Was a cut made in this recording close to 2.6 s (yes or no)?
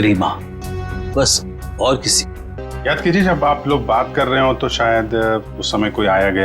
yes